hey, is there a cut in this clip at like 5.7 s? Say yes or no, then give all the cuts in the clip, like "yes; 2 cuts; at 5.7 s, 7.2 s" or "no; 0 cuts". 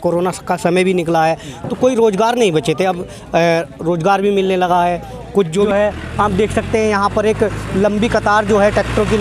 yes; 1 cut; at 5.7 s